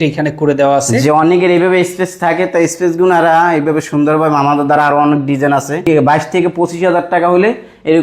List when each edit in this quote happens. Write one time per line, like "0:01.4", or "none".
0:05.9

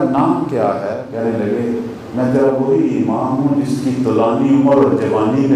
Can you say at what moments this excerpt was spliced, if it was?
0:01.0

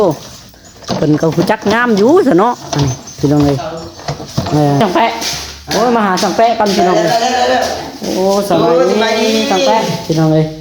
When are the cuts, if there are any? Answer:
0:04.8

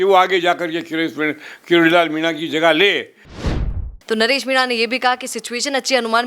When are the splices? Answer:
0:03.5

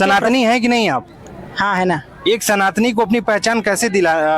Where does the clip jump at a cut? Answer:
none

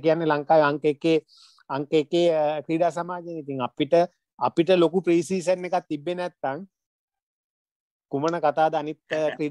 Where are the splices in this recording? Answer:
none

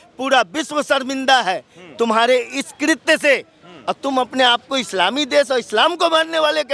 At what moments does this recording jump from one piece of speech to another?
none

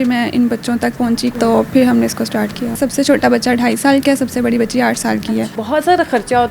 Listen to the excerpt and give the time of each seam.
0:01.3
0:02.8
0:05.6

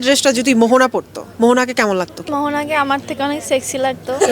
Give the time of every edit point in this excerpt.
0:01.2
0:02.3

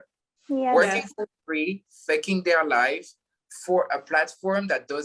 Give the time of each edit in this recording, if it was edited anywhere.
none

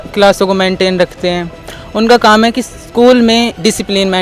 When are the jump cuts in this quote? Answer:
none

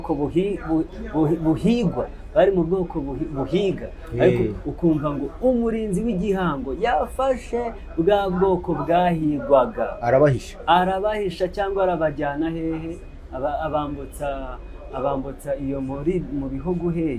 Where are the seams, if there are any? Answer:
none

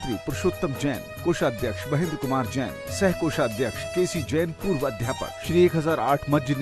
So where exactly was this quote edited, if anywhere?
0:03.8
0:05.4

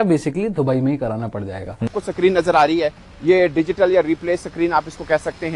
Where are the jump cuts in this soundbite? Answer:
0:01.9

